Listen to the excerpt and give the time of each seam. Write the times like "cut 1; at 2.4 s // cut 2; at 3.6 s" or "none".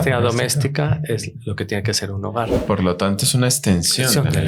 none